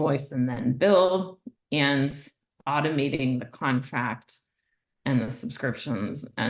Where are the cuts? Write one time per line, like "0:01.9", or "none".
none